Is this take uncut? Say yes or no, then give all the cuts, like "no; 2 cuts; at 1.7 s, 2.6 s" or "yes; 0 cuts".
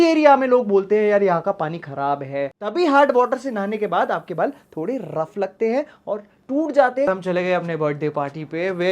no; 3 cuts; at 2.5 s, 6.3 s, 7.1 s